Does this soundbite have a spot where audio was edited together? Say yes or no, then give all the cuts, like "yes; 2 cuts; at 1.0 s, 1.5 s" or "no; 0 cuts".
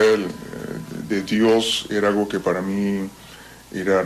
yes; 1 cut; at 2.0 s